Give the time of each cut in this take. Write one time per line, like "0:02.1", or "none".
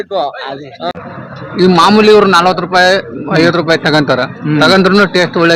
0:01.0